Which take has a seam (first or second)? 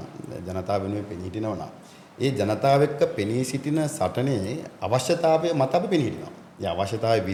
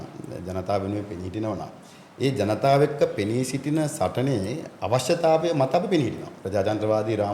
second